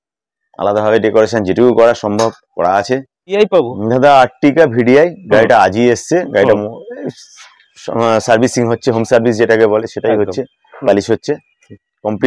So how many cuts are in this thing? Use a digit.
1